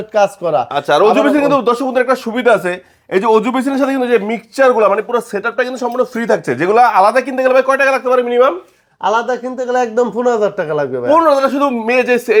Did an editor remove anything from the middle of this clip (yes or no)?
no